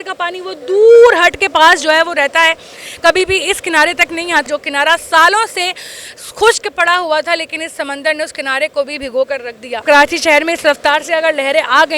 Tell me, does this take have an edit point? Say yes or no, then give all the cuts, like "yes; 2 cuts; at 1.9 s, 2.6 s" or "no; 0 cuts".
yes; 2 cuts; at 4.5 s, 9.8 s